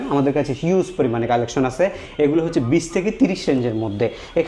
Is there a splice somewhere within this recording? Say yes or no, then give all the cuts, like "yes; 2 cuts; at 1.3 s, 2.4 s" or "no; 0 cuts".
no; 0 cuts